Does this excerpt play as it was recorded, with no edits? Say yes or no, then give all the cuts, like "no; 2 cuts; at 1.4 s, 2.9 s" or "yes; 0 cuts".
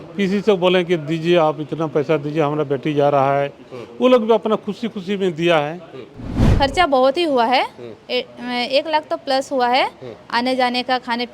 no; 1 cut; at 6.4 s